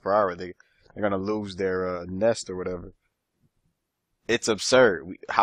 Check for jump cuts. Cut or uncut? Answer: cut